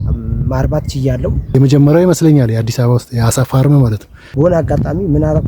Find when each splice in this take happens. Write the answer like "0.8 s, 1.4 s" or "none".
1.5 s, 4.2 s